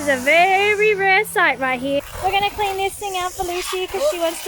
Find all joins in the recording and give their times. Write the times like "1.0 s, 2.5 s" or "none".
2.1 s